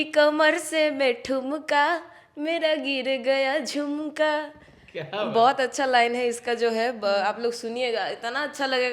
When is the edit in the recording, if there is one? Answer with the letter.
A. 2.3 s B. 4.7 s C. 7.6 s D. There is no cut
D